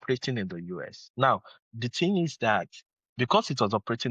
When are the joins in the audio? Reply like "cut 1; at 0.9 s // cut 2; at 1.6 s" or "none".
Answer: cut 1; at 1.0 s